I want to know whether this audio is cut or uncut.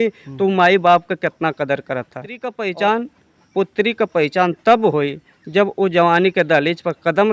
cut